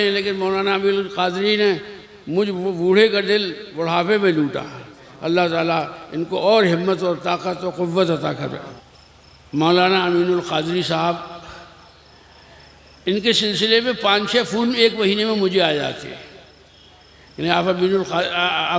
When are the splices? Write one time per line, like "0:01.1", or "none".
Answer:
0:08.7